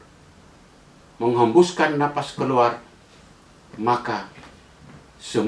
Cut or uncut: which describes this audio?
uncut